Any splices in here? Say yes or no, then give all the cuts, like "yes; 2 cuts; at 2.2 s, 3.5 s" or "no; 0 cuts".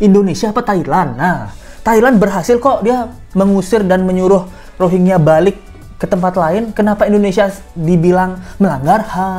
no; 0 cuts